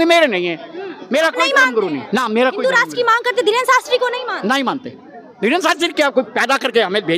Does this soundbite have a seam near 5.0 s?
no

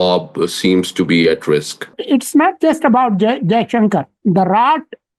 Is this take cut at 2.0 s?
yes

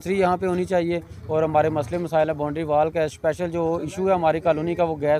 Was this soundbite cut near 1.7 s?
no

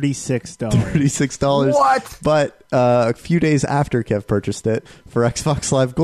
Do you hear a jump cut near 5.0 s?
yes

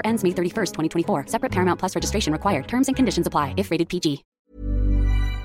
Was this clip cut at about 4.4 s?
yes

